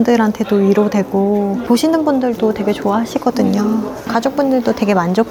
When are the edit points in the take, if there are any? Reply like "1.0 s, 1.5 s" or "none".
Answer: none